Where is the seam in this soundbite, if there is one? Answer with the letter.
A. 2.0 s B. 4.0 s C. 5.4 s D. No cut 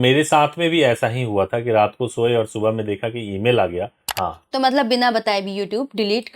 B